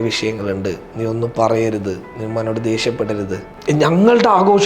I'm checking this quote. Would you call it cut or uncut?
cut